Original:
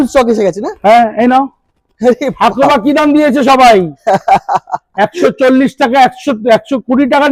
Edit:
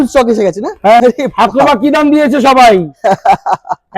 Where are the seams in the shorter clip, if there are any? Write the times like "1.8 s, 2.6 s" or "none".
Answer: 1.0 s